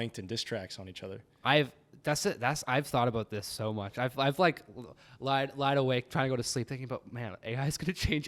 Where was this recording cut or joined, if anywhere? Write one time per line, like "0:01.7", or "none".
none